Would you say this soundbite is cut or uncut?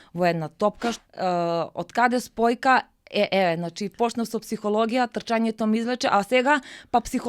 cut